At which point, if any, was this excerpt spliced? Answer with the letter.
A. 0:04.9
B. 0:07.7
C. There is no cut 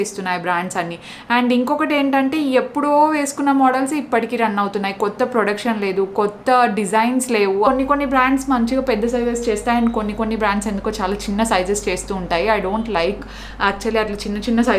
B